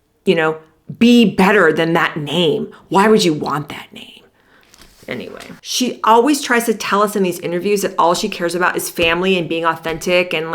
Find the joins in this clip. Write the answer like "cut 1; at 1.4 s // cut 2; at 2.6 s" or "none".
cut 1; at 5.4 s